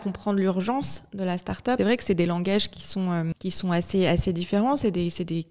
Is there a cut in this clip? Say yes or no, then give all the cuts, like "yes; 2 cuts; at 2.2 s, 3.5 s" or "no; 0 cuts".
yes; 2 cuts; at 1.8 s, 3.3 s